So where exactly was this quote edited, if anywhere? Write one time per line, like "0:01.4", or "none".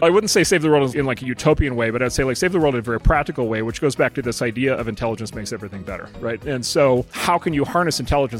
0:00.9
0:06.4
0:07.1